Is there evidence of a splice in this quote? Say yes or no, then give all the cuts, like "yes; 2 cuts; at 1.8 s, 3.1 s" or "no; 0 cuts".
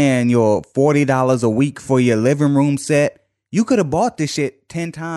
no; 0 cuts